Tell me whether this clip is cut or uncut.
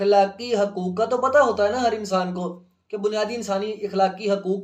uncut